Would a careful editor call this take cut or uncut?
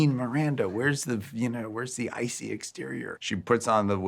cut